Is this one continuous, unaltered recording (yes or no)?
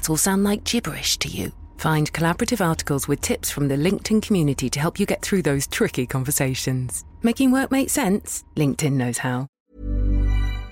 no